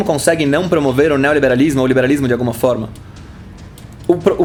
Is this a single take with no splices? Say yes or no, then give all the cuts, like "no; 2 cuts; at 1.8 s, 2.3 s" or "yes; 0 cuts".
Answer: yes; 0 cuts